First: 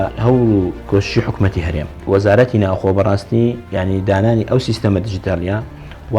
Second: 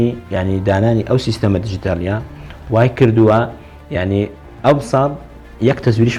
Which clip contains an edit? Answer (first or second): first